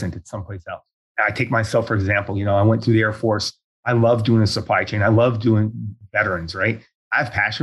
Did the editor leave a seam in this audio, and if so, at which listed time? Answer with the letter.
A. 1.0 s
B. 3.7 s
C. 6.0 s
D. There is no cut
A